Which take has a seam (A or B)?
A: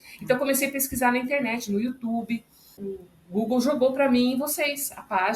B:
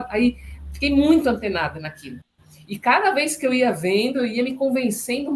A